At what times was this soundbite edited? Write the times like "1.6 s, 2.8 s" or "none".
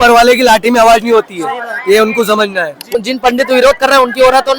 2.9 s